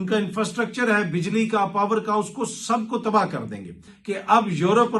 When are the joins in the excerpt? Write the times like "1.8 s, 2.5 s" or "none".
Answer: 3.9 s